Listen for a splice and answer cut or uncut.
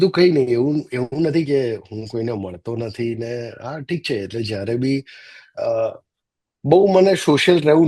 uncut